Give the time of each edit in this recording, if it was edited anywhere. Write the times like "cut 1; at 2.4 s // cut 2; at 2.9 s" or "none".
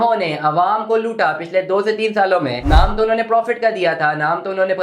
cut 1; at 2.6 s